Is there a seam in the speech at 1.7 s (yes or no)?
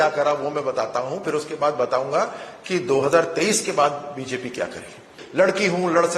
no